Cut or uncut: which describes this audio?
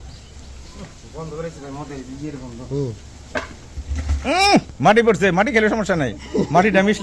uncut